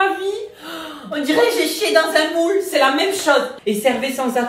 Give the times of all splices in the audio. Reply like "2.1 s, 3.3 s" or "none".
3.5 s